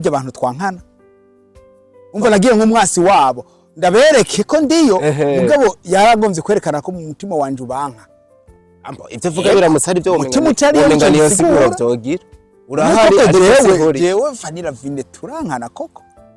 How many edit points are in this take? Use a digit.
0